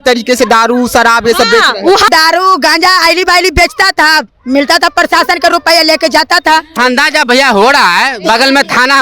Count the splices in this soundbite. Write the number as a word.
two